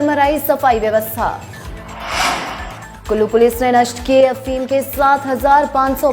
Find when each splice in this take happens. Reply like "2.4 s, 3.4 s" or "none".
1.8 s